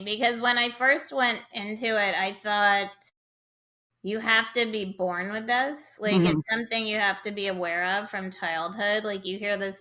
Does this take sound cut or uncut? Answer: uncut